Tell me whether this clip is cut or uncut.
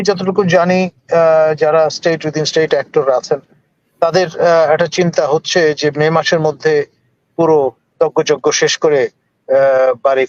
uncut